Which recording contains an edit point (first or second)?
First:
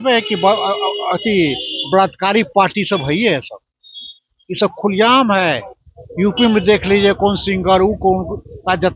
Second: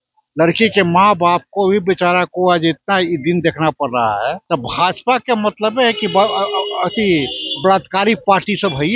second